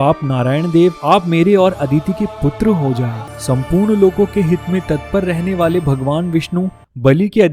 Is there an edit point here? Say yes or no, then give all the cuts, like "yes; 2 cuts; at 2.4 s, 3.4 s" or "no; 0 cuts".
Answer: yes; 1 cut; at 3.3 s